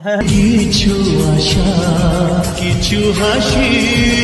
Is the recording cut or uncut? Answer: uncut